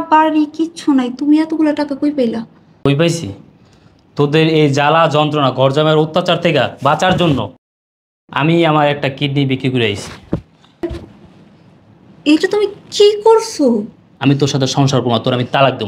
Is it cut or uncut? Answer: cut